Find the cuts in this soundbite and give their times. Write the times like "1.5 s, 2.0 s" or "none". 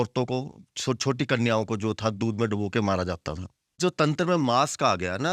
3.8 s